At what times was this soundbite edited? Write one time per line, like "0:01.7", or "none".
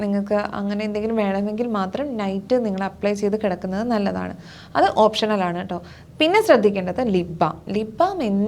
none